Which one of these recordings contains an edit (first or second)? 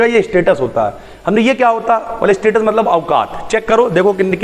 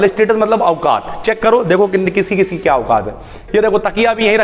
second